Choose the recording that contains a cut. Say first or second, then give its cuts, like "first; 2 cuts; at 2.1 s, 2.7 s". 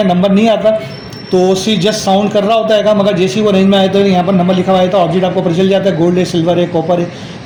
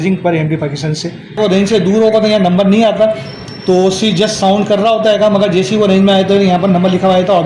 second; 1 cut; at 1.4 s